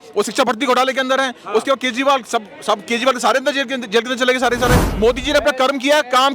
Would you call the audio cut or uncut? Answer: cut